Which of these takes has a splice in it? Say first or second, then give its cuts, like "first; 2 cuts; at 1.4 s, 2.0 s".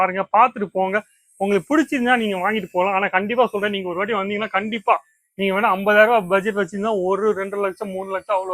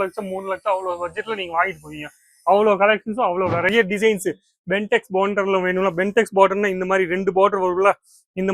second; 1 cut; at 3.7 s